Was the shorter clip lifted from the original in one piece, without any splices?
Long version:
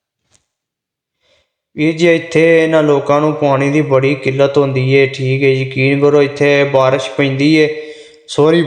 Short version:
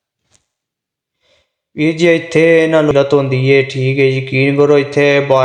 no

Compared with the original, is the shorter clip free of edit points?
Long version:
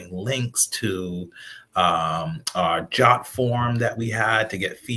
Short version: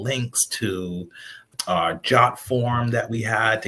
no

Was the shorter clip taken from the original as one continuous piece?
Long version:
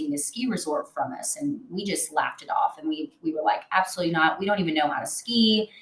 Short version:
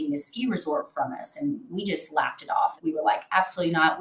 no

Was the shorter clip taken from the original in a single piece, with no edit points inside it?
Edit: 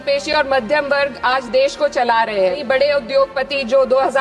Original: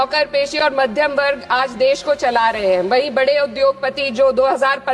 no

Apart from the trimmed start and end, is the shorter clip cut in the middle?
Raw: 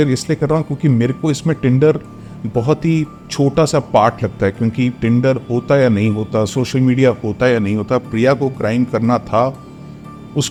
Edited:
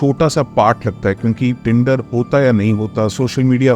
no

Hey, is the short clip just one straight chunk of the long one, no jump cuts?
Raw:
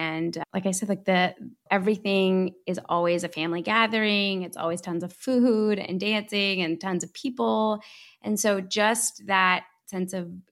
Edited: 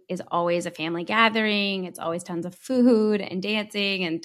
yes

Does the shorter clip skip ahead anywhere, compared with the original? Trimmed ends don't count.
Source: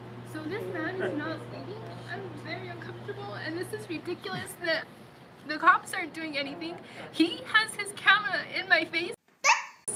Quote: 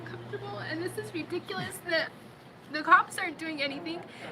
no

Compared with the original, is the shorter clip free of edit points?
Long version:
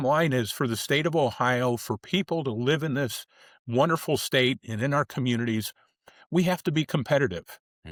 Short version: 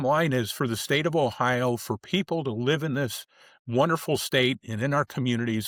yes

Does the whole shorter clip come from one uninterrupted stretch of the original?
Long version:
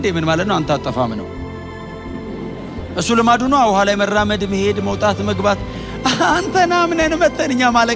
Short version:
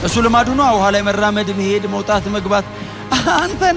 yes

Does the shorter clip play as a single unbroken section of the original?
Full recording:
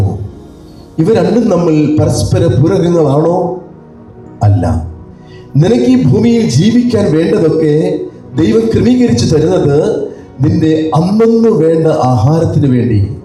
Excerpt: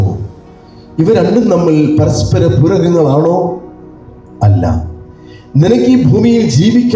yes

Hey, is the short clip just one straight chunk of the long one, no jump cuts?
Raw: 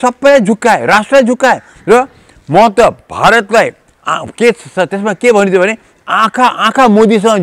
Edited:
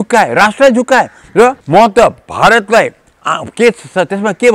no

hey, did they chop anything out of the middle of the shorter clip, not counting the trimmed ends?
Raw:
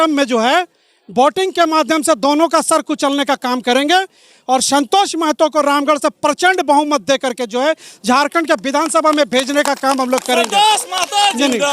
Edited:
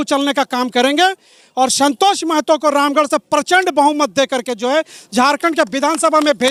no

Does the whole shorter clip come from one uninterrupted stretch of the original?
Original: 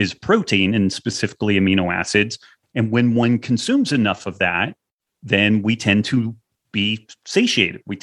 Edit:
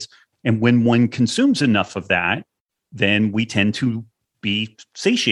yes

